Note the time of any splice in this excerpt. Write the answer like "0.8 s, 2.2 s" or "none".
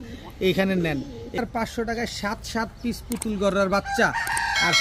1.4 s